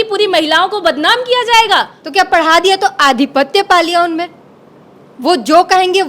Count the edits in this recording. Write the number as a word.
one